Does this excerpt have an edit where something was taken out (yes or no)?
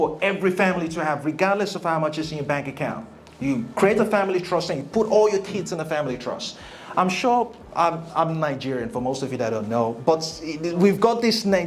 no